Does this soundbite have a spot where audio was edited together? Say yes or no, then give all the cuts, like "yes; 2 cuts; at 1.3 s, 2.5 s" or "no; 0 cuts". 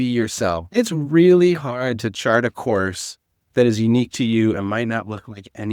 no; 0 cuts